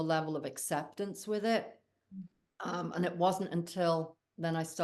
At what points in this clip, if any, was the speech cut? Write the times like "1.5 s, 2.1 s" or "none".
none